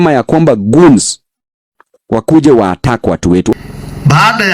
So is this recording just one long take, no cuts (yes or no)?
no